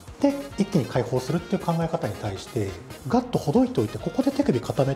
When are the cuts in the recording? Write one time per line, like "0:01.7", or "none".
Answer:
0:02.9